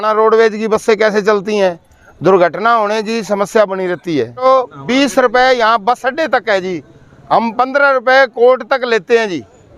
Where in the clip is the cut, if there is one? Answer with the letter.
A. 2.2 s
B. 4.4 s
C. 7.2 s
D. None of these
B